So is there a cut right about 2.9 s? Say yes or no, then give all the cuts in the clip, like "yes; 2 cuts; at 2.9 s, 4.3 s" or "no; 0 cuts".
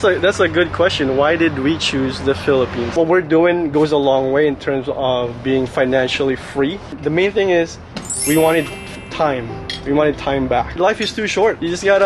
yes; 3 cuts; at 2.9 s, 7.0 s, 11.2 s